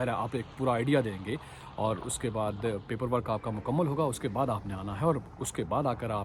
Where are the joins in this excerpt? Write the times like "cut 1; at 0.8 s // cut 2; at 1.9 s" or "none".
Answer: none